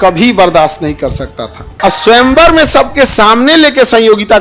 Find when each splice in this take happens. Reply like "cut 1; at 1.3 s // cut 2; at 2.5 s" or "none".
cut 1; at 1.6 s

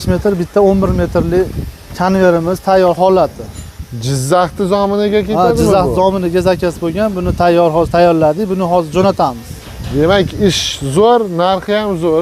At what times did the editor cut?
none

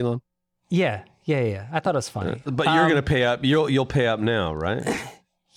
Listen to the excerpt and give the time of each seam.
cut 1; at 2.4 s

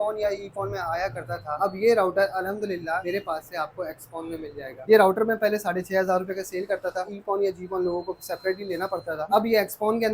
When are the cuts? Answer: cut 1; at 3.0 s // cut 2; at 4.8 s // cut 3; at 7.0 s

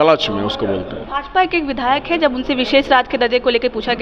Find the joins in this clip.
cut 1; at 1.0 s

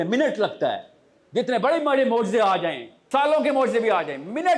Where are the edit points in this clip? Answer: cut 1; at 2.9 s

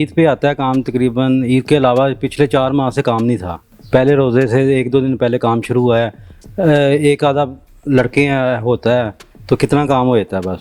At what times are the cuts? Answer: none

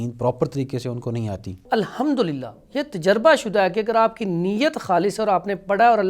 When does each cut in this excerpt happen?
cut 1; at 1.7 s

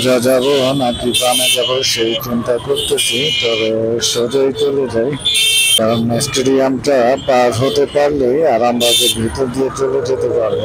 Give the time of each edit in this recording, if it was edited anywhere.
cut 1; at 5.8 s

